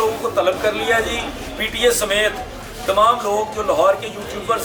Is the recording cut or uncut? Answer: uncut